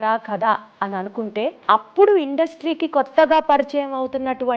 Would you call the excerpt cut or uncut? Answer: cut